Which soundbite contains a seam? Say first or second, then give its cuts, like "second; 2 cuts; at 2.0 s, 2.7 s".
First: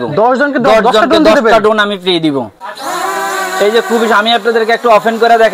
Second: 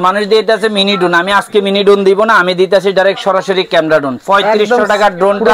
first; 1 cut; at 2.5 s